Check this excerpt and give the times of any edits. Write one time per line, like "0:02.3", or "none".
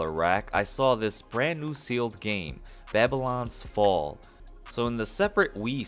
0:04.3